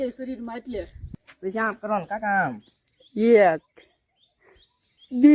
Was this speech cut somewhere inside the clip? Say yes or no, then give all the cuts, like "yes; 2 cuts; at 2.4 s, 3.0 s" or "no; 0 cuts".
yes; 1 cut; at 1.0 s